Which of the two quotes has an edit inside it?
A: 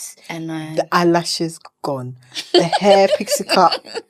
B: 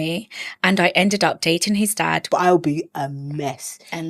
B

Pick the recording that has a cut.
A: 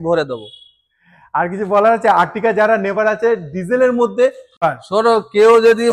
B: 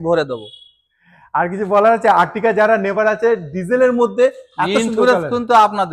A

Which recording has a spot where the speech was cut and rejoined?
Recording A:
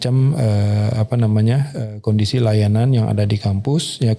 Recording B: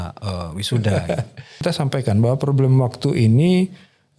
B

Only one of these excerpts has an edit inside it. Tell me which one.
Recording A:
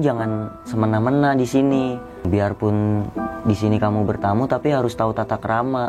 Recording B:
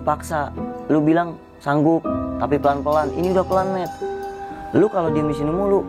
A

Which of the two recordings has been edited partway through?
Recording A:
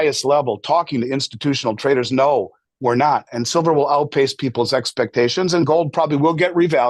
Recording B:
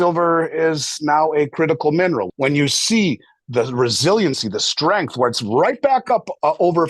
B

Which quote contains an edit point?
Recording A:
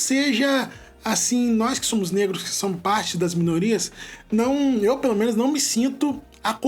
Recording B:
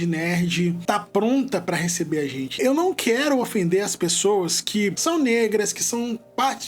B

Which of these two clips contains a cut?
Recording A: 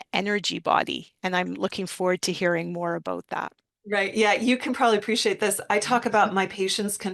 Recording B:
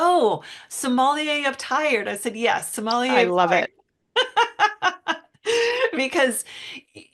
A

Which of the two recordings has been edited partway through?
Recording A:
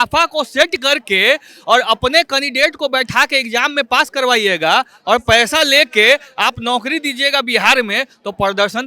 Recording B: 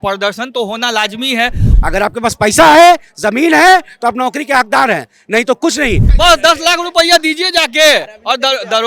B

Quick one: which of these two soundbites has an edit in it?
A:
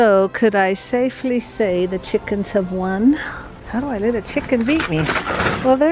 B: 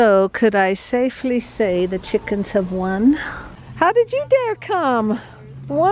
B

